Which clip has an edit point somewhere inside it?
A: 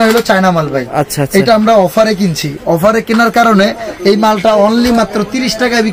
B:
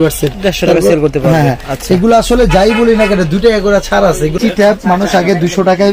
B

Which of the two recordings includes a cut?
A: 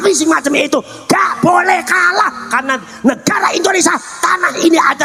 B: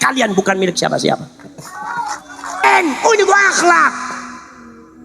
B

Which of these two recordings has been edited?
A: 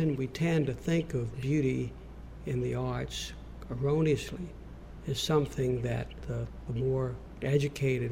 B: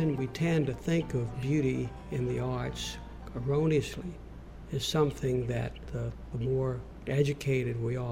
B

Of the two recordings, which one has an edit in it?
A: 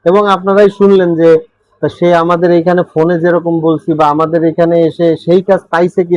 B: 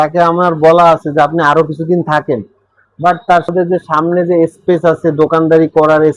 B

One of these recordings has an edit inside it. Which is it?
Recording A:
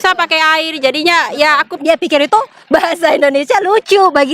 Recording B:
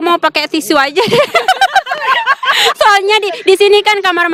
A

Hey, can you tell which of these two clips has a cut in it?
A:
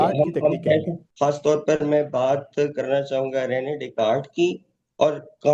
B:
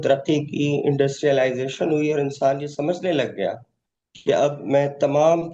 A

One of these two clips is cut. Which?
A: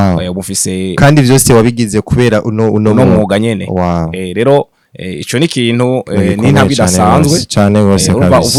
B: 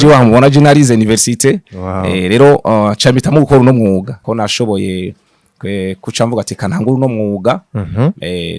B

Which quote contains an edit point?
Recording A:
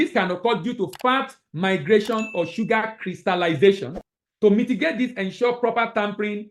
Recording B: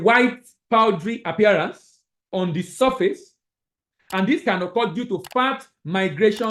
A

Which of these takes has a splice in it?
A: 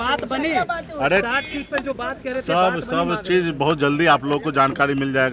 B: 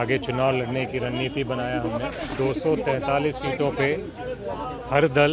B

